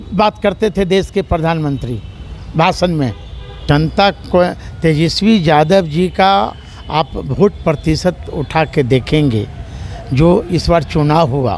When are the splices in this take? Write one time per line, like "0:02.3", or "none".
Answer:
0:03.6